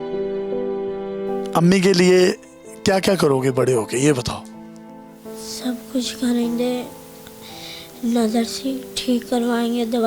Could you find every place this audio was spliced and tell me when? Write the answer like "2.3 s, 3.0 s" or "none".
1.3 s